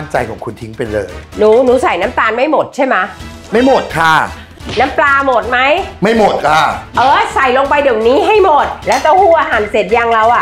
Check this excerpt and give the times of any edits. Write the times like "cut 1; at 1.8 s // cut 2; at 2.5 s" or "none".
cut 1; at 1.2 s // cut 2; at 4.6 s // cut 3; at 6.8 s // cut 4; at 8.8 s